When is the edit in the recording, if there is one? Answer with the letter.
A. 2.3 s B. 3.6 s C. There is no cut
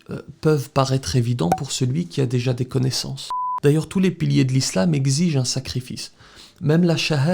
B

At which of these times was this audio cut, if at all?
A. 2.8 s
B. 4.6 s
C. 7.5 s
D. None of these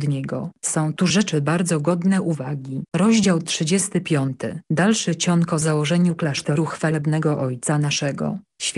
A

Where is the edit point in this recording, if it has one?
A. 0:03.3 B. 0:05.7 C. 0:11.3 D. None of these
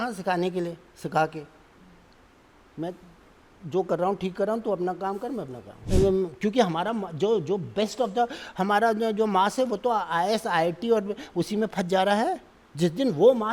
B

